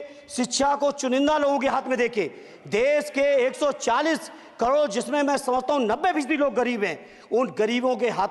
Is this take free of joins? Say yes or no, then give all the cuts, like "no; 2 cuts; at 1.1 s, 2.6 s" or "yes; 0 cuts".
yes; 0 cuts